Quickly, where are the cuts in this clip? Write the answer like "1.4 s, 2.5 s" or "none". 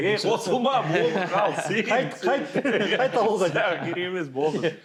none